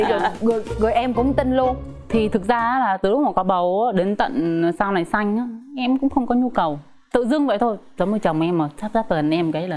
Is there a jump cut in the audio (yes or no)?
no